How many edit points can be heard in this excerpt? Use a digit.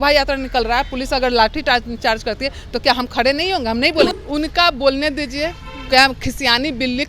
1